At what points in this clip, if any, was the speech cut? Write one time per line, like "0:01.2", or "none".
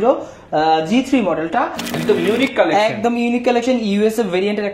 0:01.9